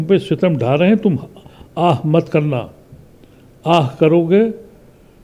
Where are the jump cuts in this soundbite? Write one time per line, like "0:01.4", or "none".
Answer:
none